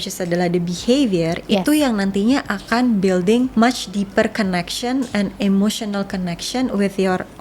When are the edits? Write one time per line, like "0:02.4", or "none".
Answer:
0:03.5